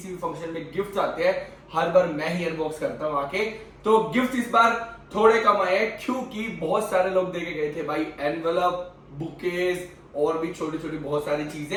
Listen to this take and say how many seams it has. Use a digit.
0